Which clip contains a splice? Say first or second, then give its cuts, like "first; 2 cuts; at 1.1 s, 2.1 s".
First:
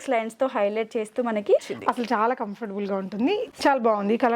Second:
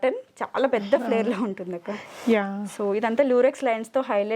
first; 2 cuts; at 1.7 s, 3.5 s